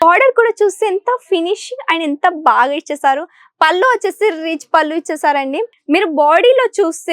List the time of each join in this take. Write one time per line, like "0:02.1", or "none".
0:05.7